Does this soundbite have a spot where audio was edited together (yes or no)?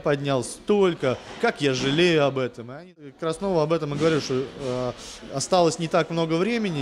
yes